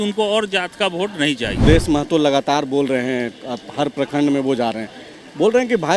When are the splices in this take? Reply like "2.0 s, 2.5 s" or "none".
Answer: 1.6 s